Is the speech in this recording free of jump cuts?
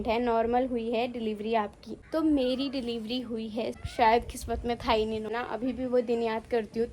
no; 3 cuts; at 1.9 s, 3.8 s, 5.3 s

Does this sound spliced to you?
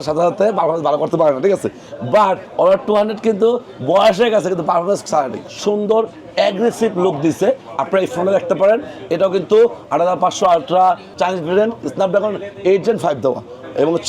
yes; 2 cuts; at 5.4 s, 11.1 s

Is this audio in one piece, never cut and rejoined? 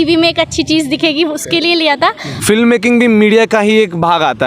no; 1 cut; at 2.3 s

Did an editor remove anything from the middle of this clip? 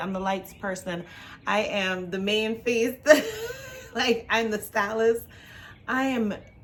no; 0 cuts

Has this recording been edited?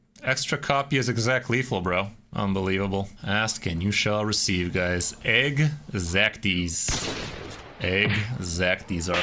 yes; 2 cuts; at 2.2 s, 3.2 s

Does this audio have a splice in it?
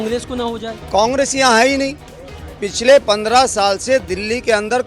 no; 0 cuts

